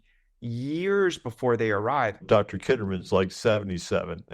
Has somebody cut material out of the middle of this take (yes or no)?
yes